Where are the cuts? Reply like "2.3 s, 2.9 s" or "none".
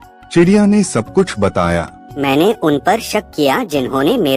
2.1 s